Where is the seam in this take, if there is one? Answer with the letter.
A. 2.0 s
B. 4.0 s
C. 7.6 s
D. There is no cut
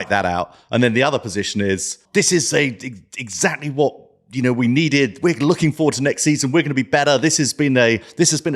A